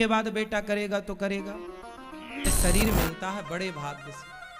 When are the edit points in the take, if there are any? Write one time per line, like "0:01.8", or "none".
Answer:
0:02.5